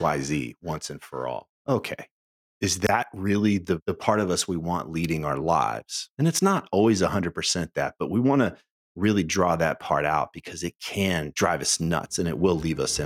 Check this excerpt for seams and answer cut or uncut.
uncut